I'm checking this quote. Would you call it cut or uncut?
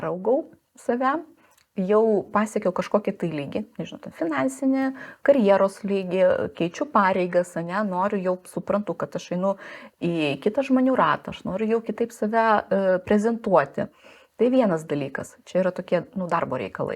uncut